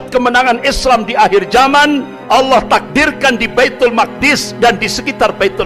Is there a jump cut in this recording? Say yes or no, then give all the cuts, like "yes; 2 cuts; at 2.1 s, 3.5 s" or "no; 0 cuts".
no; 0 cuts